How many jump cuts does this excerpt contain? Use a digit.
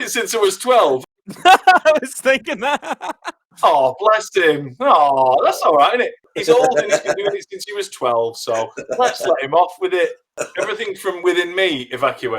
1